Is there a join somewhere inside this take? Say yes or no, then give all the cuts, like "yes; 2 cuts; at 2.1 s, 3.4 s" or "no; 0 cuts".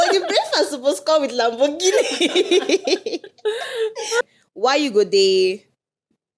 yes; 1 cut; at 4.2 s